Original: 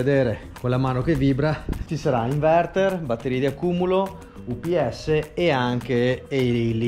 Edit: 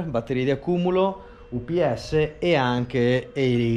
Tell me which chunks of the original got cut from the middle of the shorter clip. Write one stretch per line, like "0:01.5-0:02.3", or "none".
none